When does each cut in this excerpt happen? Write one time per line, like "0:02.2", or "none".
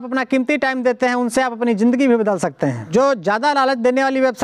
0:02.8